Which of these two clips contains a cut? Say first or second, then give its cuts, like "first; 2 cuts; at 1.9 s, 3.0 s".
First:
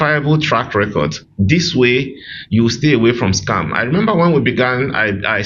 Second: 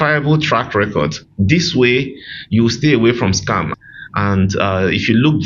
second; 1 cut; at 3.7 s